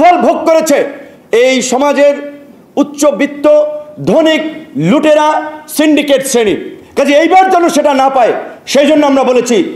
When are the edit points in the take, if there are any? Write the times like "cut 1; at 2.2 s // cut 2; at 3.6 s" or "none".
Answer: none